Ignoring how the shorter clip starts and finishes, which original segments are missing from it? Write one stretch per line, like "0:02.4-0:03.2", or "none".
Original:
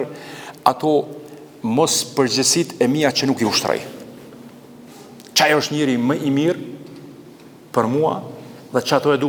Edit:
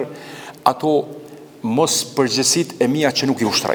none